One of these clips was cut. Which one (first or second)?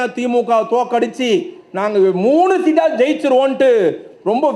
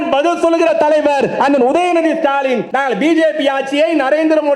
second